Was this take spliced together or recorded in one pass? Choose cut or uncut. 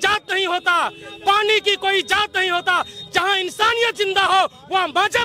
uncut